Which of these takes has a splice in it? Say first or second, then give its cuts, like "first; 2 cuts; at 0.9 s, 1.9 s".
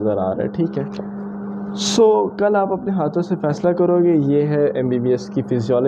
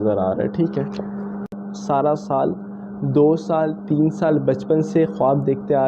second; 1 cut; at 1.6 s